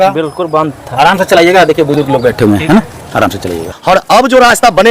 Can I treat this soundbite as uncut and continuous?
no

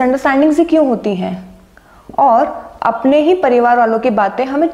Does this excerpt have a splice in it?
no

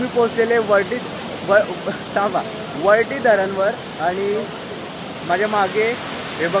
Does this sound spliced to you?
no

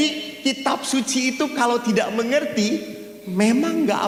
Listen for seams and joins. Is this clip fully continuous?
yes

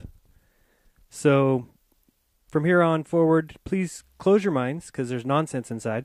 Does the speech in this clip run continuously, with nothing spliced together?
no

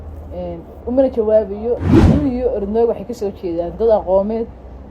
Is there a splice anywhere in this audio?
yes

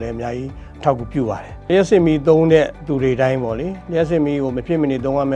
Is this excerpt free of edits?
no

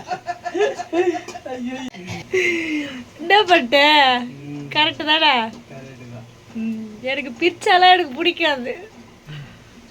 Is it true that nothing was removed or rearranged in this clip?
no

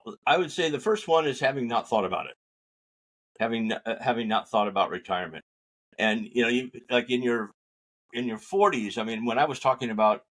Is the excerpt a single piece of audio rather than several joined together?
yes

